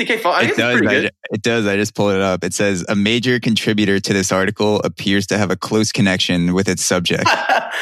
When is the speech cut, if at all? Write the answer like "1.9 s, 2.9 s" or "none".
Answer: none

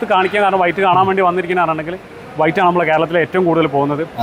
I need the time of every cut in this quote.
none

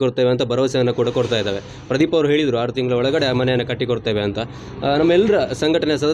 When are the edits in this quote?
none

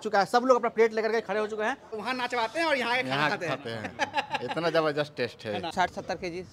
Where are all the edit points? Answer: 1.9 s, 5.7 s

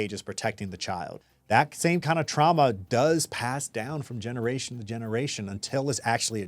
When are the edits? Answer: 1.2 s

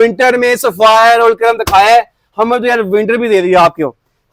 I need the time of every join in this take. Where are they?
none

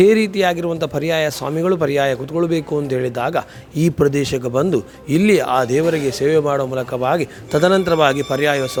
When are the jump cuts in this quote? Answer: none

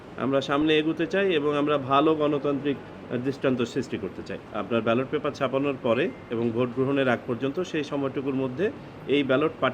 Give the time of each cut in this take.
4.4 s

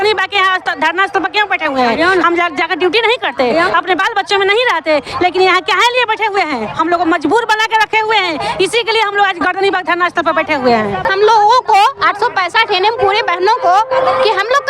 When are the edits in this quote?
none

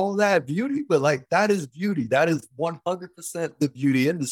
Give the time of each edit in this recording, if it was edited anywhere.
none

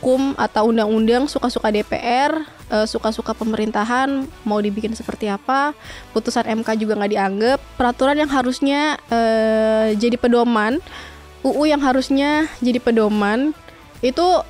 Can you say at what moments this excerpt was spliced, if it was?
7.6 s

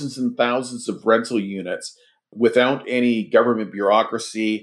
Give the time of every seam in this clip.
2.2 s

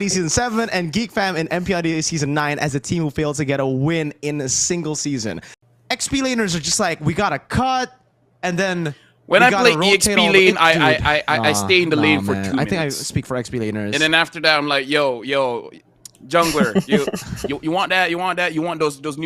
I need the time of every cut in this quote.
5.5 s

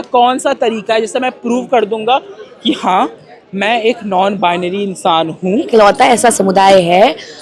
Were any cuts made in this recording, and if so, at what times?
5.7 s

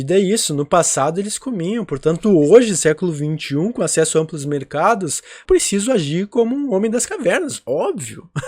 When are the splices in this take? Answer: 5.3 s

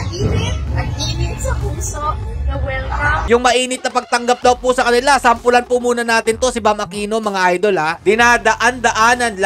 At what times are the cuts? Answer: 3.3 s, 8.0 s

